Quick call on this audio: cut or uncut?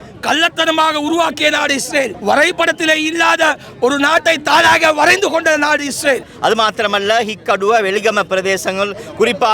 cut